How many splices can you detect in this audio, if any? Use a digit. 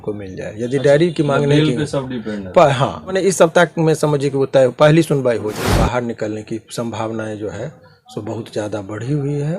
2